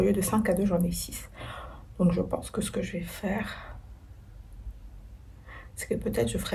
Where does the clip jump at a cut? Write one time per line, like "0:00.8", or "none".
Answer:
none